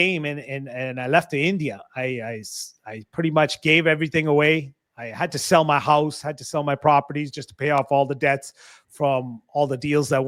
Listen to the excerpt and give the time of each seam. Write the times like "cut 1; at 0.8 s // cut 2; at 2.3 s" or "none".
none